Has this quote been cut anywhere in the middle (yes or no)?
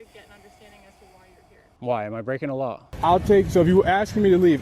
yes